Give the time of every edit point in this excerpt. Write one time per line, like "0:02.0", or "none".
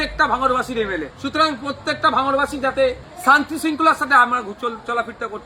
0:01.1
0:03.1